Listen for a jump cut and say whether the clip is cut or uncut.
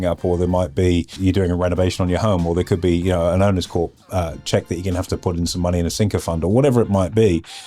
cut